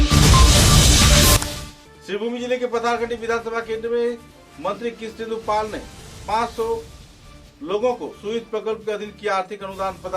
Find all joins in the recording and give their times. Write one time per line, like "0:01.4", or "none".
0:01.4